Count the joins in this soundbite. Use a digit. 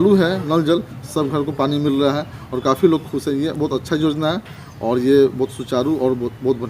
0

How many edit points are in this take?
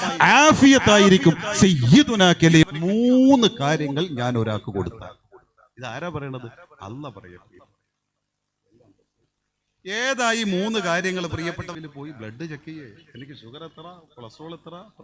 2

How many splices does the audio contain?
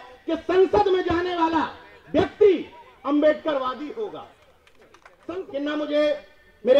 1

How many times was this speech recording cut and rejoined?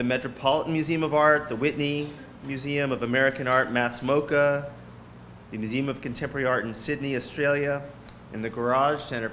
0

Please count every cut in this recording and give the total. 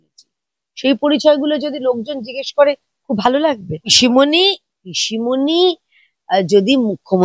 1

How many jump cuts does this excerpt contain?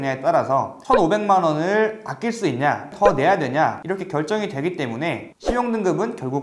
1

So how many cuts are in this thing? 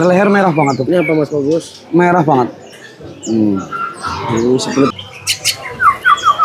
1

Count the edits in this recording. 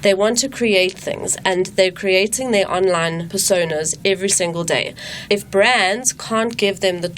1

